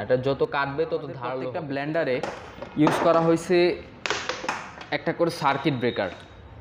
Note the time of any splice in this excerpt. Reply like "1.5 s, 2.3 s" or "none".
1.3 s